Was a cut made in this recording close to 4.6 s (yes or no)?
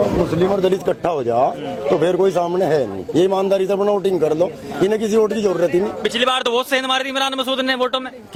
no